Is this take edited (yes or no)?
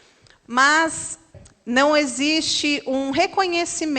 yes